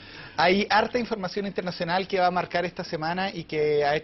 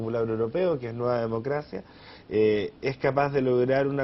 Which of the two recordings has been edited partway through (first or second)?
second